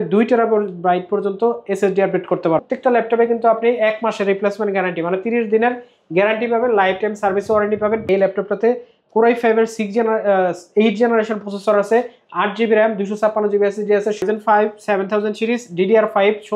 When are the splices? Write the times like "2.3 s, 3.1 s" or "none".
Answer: 2.7 s, 8.1 s, 14.2 s